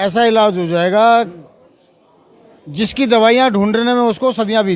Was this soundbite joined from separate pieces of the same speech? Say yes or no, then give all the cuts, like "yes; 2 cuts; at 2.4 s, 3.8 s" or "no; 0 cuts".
no; 0 cuts